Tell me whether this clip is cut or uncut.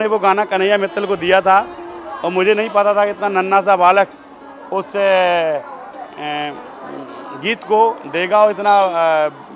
uncut